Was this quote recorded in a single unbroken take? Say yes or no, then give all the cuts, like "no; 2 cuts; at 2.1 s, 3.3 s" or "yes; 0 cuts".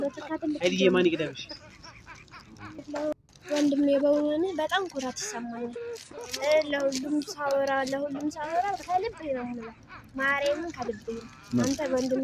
no; 1 cut; at 2.8 s